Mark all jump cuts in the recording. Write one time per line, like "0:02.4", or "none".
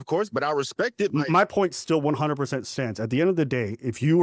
0:01.1